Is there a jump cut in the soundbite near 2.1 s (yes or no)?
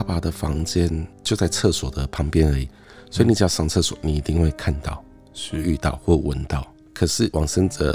no